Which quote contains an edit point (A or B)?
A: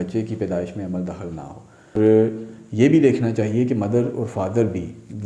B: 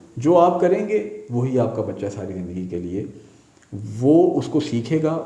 A